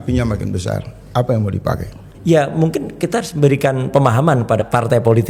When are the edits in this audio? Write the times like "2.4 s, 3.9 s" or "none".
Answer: none